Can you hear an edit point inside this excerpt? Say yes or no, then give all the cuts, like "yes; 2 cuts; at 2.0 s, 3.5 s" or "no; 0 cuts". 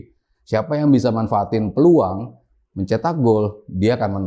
no; 0 cuts